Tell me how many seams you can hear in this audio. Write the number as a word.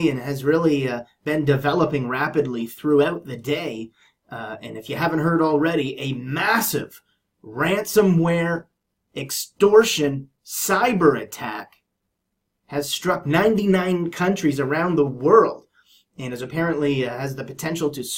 zero